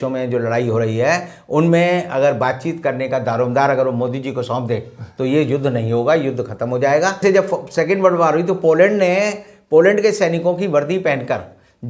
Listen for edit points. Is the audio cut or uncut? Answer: cut